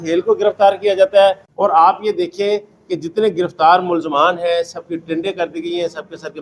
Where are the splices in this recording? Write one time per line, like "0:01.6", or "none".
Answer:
0:01.5